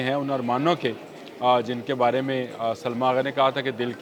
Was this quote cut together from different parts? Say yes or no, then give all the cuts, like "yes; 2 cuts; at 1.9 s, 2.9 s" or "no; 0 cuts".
no; 0 cuts